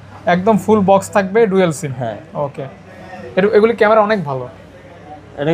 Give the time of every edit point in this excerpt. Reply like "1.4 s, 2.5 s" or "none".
none